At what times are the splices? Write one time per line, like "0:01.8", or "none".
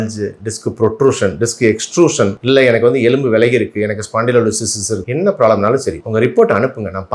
0:05.0